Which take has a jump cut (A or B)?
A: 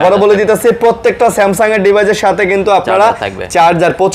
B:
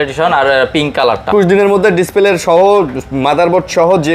B